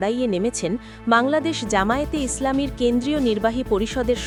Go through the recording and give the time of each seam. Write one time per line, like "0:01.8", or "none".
none